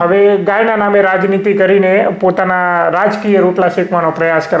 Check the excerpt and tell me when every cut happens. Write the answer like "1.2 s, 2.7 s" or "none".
none